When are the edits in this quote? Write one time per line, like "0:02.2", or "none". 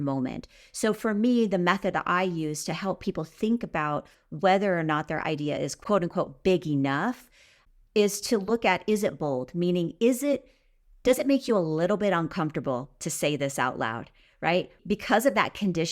0:14.8